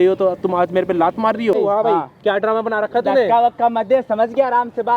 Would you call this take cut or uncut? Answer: cut